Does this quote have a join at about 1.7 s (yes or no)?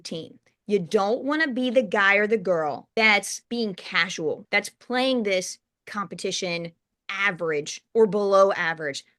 no